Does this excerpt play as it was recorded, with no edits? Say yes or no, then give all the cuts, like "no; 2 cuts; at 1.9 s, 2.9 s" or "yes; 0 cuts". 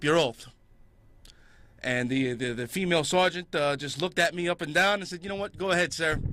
yes; 0 cuts